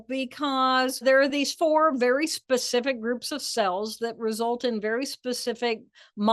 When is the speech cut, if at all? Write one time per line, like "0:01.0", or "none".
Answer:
0:01.0